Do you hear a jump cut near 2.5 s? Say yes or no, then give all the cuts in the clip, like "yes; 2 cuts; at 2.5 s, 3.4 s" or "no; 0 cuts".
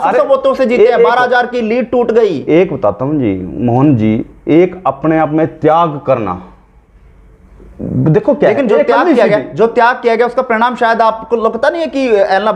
no; 0 cuts